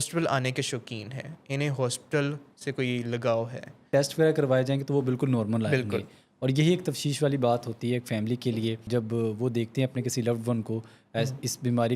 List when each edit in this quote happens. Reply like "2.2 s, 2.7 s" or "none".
3.9 s, 8.9 s